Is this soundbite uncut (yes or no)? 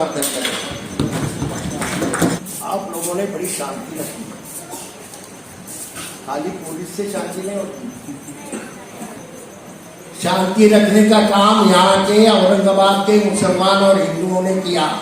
no